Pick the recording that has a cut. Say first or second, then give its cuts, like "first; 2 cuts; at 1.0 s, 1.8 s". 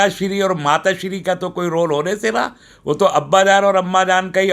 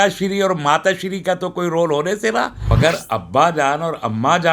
second; 1 cut; at 2.7 s